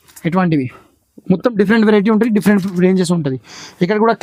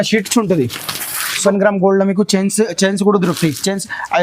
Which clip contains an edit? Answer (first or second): second